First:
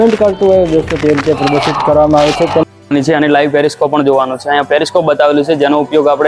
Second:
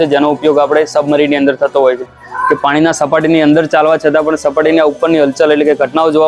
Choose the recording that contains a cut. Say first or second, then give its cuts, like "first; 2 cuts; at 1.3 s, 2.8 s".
first; 1 cut; at 2.6 s